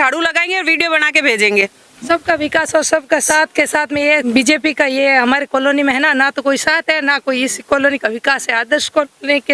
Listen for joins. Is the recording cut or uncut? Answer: cut